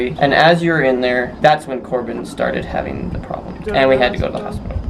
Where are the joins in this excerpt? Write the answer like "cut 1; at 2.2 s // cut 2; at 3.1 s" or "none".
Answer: cut 1; at 1.3 s // cut 2; at 3.6 s